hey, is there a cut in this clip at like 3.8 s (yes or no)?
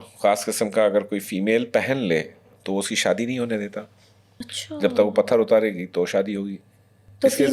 no